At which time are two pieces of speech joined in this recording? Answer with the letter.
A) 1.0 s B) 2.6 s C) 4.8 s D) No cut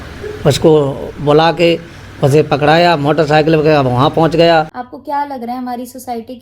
C